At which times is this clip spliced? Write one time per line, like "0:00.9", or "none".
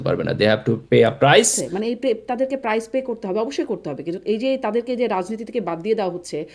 0:01.7

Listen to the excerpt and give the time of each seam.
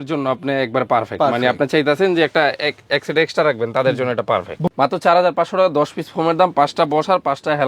0:04.6

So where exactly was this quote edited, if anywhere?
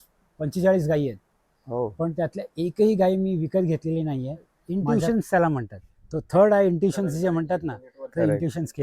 0:04.6

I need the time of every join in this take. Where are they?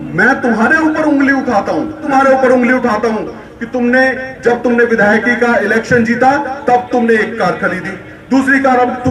0:02.0

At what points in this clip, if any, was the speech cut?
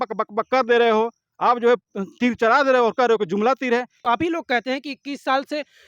0:04.0

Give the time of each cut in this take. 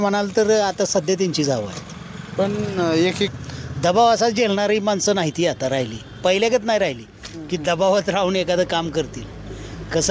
0:03.3

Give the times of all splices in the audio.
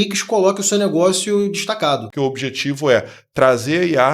0:02.1

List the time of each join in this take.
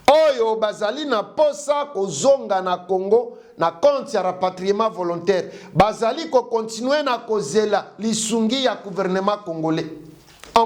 none

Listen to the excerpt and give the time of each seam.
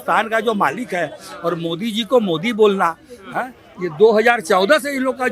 none

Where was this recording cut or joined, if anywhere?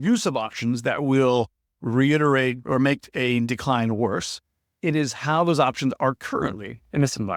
none

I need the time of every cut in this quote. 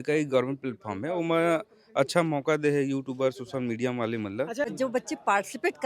0:04.7

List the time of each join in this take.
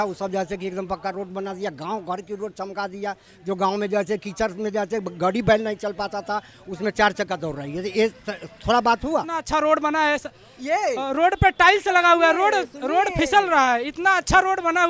0:09.4

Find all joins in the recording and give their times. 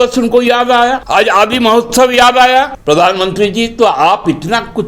0:01.0
0:02.8

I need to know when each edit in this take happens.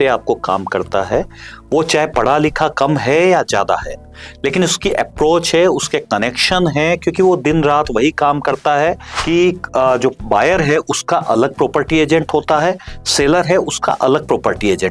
0:09.1

